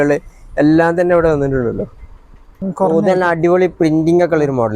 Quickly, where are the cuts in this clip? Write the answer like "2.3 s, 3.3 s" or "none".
2.6 s